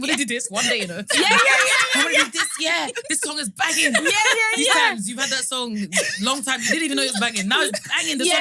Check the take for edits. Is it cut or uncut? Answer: uncut